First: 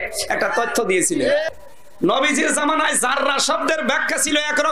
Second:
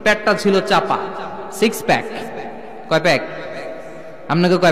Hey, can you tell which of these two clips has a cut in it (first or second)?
first